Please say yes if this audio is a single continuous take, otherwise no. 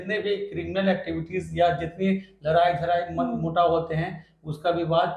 yes